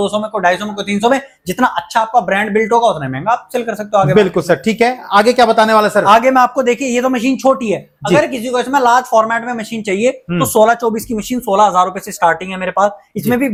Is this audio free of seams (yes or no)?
yes